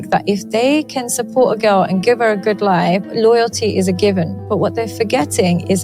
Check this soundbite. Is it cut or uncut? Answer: cut